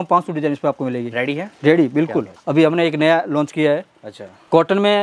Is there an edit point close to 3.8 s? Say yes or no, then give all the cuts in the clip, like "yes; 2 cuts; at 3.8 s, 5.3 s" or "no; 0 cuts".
no; 1 cut; at 2.4 s